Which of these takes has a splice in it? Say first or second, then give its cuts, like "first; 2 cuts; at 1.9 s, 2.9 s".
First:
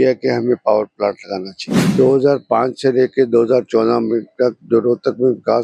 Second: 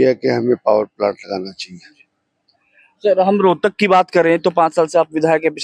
first; 1 cut; at 1.8 s